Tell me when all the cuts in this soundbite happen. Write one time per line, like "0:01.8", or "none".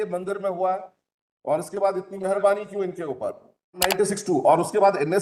0:03.9